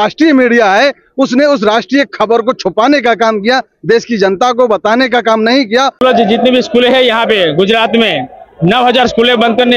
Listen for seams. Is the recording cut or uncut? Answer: cut